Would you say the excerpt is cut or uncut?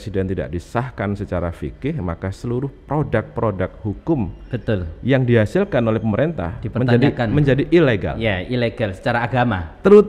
uncut